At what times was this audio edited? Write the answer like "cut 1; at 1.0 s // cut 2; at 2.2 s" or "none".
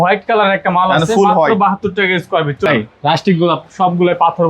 cut 1; at 2.7 s